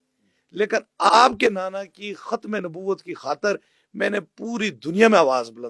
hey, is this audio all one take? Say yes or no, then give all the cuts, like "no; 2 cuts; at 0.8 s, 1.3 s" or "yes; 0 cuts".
yes; 0 cuts